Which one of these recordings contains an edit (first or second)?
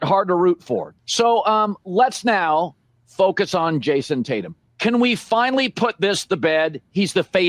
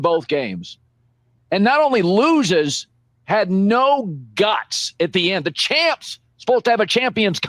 first